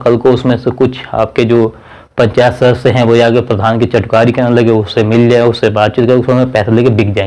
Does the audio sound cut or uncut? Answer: uncut